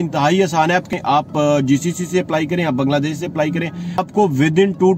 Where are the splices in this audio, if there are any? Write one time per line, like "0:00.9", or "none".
0:01.0
0:04.0